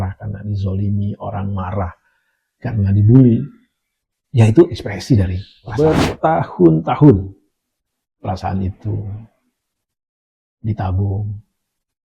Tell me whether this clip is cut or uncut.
cut